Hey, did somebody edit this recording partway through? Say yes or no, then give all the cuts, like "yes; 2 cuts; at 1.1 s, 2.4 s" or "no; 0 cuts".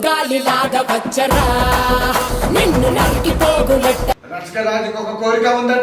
yes; 1 cut; at 4.5 s